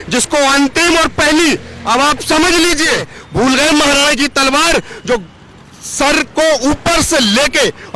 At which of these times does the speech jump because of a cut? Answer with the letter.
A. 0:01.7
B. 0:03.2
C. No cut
B